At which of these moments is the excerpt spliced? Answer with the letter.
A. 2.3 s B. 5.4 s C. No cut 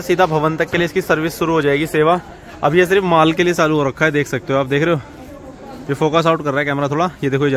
C